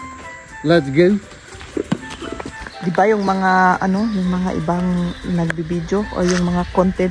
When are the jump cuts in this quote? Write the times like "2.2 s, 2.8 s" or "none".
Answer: 2.5 s